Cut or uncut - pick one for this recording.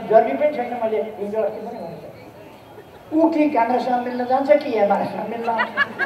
uncut